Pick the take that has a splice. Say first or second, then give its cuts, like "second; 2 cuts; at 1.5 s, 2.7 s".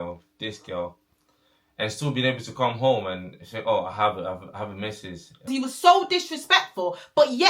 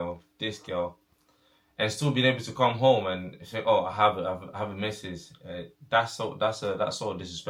first; 1 cut; at 5.5 s